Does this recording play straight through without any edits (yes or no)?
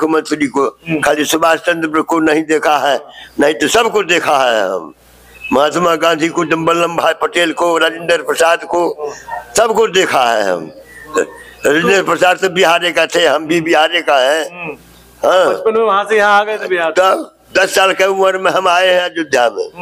yes